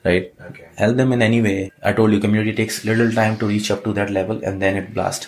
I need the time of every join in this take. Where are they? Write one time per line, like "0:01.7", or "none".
0:01.7